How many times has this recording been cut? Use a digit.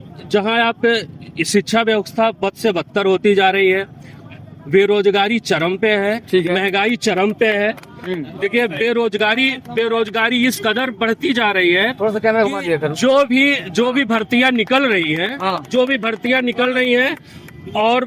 0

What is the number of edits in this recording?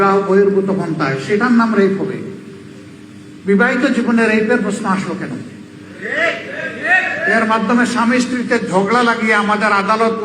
1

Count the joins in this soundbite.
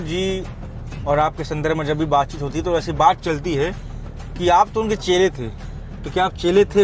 0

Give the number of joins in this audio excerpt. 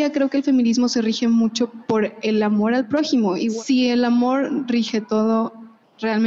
1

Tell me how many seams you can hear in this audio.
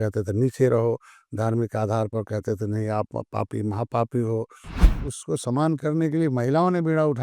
1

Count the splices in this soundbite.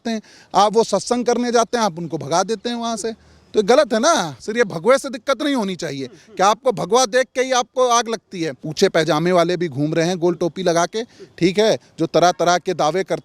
2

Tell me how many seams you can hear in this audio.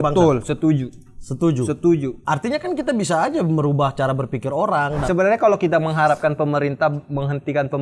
2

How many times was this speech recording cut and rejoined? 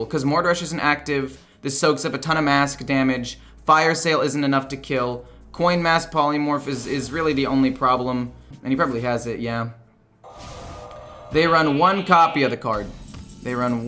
1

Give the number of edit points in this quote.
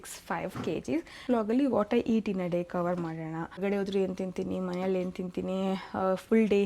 2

